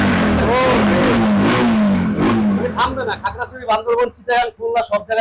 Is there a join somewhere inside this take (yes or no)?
no